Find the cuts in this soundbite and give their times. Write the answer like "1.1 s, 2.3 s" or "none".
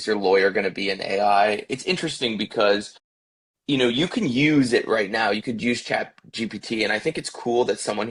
none